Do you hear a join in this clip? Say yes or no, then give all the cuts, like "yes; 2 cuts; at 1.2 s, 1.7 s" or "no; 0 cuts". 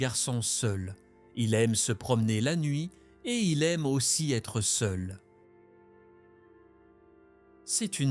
no; 0 cuts